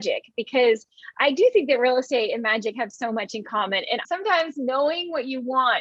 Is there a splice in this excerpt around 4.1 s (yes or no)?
yes